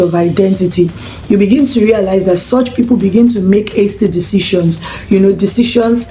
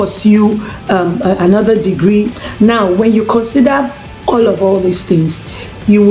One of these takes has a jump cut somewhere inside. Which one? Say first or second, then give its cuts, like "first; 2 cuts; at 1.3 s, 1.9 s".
second; 1 cut; at 2.4 s